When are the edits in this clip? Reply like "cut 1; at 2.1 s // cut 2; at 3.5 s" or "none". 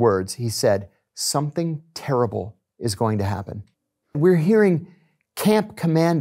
cut 1; at 4.2 s